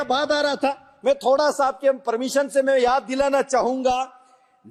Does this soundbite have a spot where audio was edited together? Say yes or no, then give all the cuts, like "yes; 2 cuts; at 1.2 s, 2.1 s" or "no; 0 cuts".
no; 0 cuts